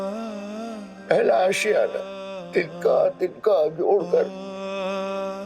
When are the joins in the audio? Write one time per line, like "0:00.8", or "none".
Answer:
0:02.4